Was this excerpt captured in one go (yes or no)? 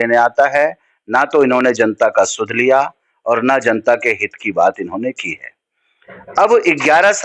yes